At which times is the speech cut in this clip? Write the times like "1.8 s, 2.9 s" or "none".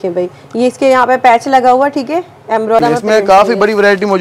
2.8 s